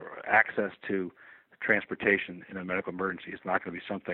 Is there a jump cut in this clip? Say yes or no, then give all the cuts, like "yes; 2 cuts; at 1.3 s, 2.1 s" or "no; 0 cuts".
no; 0 cuts